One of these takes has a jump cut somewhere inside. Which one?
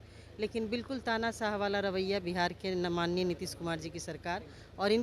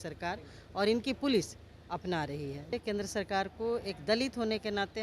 second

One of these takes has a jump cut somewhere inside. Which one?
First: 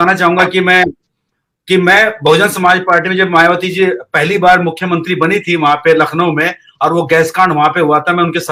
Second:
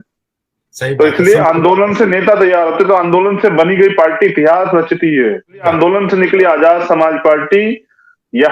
second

